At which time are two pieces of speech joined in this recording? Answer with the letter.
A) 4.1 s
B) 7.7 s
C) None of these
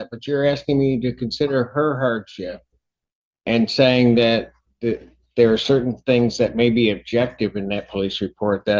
C